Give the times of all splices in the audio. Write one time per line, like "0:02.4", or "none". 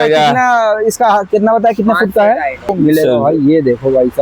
0:02.7